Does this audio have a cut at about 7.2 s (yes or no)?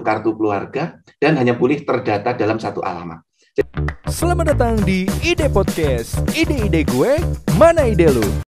no